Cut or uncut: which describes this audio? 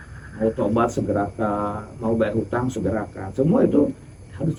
uncut